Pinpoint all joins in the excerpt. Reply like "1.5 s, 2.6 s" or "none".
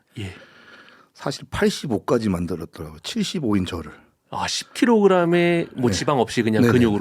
none